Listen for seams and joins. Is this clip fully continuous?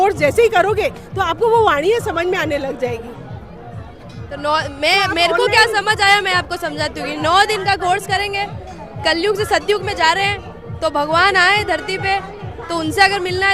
yes; 0 cuts

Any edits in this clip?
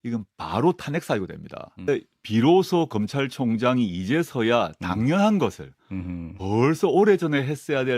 yes; 1 cut; at 1.9 s

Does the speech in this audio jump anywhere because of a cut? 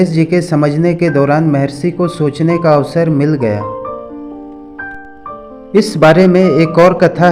yes; 2 cuts; at 3.6 s, 5.7 s

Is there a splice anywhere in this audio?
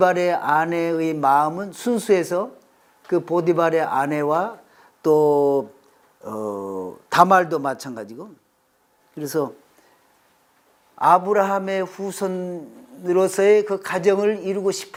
no; 0 cuts

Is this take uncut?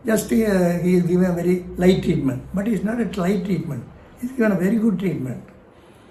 yes; 0 cuts

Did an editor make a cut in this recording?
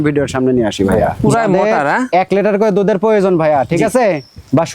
yes; 1 cut; at 1.1 s

